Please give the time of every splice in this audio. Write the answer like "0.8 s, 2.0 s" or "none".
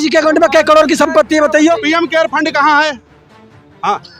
1.8 s